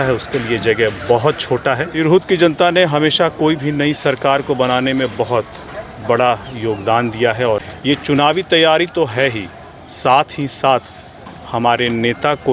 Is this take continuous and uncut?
no; 2 cuts; at 2.1 s, 7.7 s

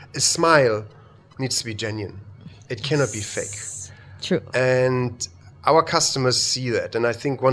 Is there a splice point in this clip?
no; 0 cuts

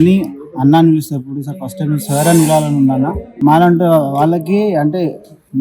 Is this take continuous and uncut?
no; 1 cut; at 3.2 s

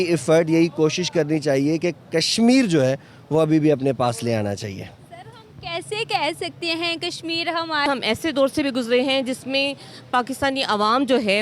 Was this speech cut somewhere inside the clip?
yes; 1 cut; at 7.9 s

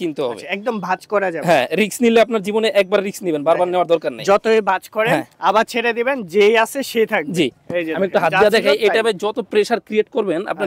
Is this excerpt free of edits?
yes; 0 cuts

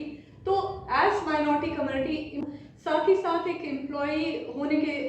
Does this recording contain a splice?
yes; 1 cut; at 2.4 s

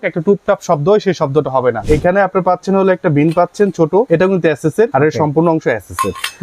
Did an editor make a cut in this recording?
yes; 3 cuts; at 1.8 s, 4.1 s, 4.9 s

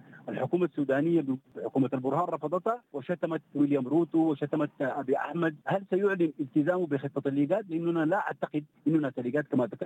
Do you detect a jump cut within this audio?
yes; 4 cuts; at 1.5 s, 2.9 s, 5.6 s, 8.7 s

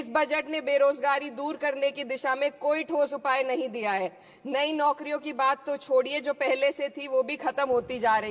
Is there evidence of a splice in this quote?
no; 0 cuts

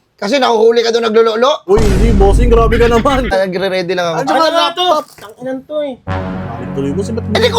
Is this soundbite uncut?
no; 1 cut; at 3.3 s

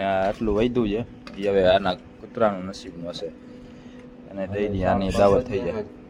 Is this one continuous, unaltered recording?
yes; 0 cuts

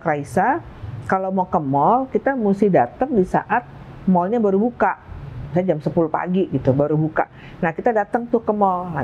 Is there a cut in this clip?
no; 0 cuts

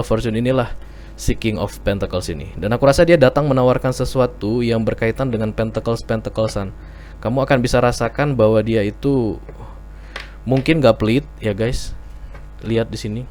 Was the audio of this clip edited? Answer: no; 0 cuts

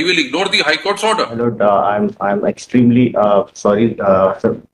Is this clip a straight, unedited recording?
no; 1 cut; at 1.4 s

